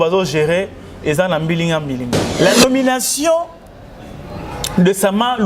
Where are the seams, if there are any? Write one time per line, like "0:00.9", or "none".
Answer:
0:02.2